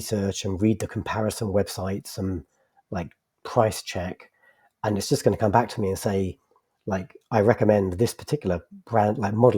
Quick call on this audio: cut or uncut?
uncut